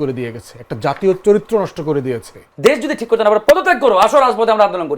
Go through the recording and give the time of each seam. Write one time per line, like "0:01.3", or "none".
0:02.5